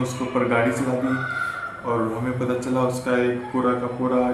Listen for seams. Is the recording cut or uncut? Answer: uncut